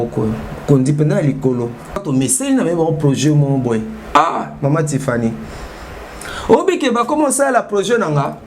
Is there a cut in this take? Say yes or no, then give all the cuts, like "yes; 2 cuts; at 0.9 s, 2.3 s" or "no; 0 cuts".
yes; 1 cut; at 2.0 s